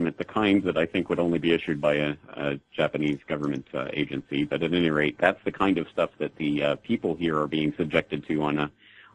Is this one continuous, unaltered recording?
no; 1 cut; at 4.3 s

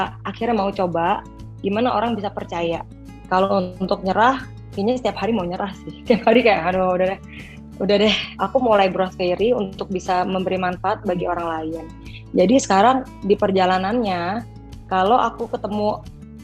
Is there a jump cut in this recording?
yes; 2 cuts; at 3.2 s, 8.3 s

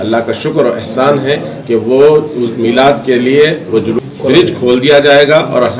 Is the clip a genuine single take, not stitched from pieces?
no; 1 cut; at 4.0 s

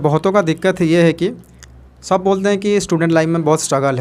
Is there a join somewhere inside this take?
no; 0 cuts

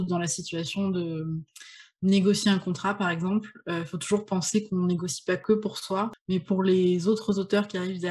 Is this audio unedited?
no; 1 cut; at 5.7 s

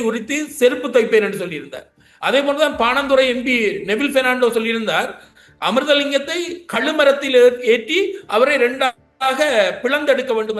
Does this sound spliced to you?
no; 0 cuts

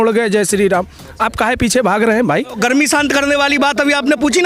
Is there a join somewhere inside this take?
yes; 1 cut; at 2.6 s

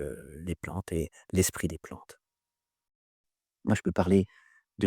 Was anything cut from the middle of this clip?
yes; 1 cut; at 3.1 s

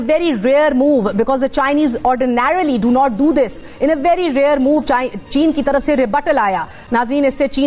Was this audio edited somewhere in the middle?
yes; 1 cut; at 6.8 s

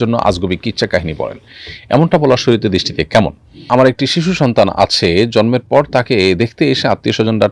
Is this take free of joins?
no; 1 cut; at 3.6 s

